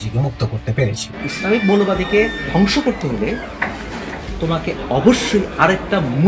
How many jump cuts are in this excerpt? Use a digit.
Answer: 1